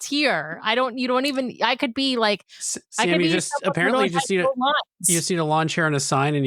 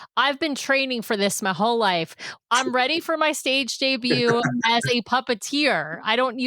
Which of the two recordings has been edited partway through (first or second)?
second